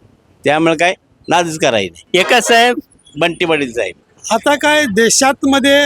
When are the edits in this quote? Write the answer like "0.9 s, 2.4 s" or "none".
4.0 s